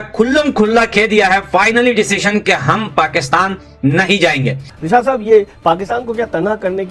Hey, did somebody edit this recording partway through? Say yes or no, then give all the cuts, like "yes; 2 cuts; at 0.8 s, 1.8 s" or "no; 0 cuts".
yes; 1 cut; at 4.7 s